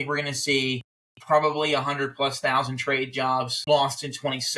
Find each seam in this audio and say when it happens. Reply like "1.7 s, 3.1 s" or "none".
3.6 s